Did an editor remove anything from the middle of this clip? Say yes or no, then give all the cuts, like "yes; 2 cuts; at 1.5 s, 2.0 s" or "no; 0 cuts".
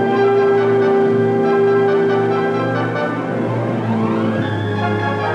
yes; 1 cut; at 3.4 s